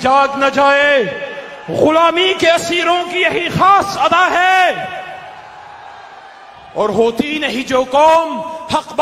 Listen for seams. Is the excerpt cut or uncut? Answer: uncut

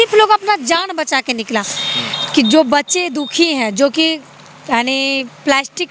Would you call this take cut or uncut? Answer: cut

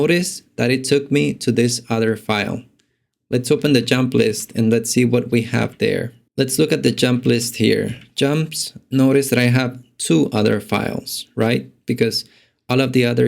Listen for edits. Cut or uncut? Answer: cut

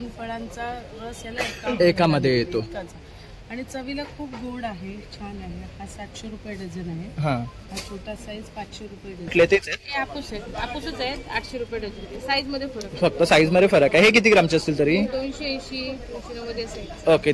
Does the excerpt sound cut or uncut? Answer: cut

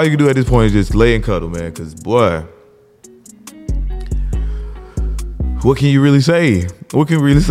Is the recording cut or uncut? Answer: uncut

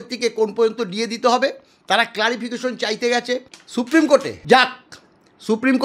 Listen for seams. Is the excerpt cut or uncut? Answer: cut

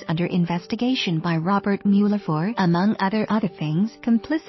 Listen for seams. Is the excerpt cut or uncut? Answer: uncut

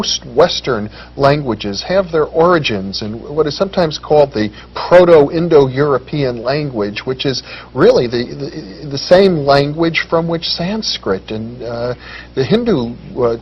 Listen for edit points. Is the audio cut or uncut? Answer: uncut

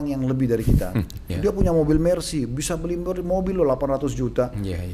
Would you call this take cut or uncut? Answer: cut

